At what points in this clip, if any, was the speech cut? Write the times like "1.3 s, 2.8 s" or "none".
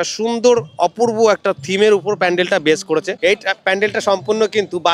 3.1 s